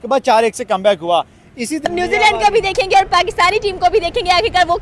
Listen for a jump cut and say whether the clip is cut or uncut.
cut